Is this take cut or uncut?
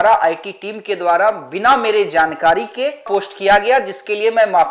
cut